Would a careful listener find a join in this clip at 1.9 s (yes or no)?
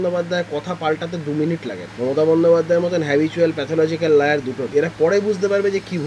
yes